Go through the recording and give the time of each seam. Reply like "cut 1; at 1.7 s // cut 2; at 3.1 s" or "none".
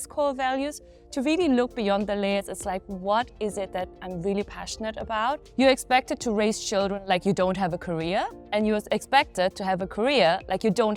cut 1; at 5.4 s